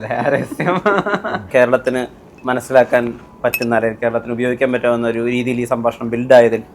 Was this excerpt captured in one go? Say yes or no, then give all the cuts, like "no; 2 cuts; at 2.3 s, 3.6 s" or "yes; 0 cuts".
no; 1 cut; at 1.5 s